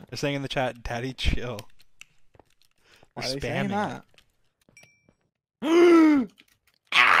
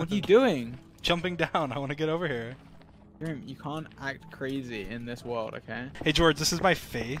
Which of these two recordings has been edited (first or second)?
second